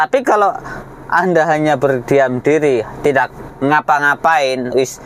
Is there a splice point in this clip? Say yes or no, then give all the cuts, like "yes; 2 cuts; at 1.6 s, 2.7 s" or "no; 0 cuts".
no; 0 cuts